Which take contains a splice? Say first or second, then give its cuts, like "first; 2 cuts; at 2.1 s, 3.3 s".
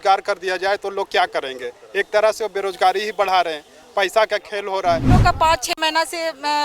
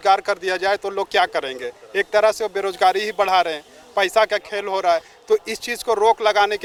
first; 1 cut; at 5.1 s